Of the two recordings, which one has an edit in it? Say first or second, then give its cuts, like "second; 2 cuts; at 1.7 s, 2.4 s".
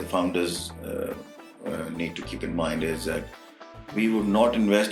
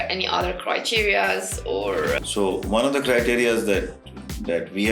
second; 1 cut; at 2.2 s